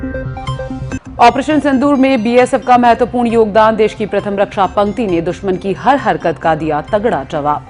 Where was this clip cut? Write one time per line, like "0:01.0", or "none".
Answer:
0:01.0